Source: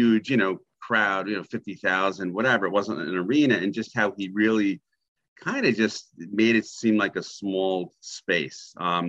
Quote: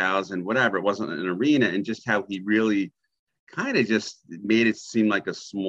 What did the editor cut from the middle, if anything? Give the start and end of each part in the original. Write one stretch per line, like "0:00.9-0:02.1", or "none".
none